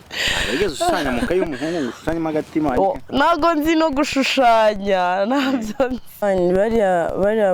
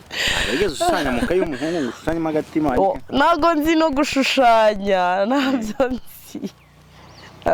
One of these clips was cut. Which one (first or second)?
first